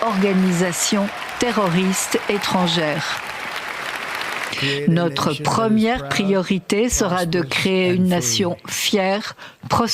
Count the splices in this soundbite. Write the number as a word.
one